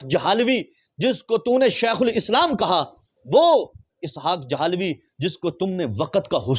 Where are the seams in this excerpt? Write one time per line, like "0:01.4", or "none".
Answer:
none